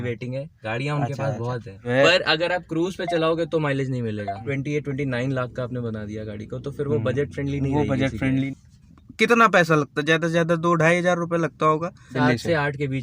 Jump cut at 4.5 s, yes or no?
yes